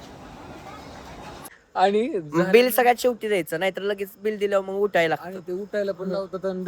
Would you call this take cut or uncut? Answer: cut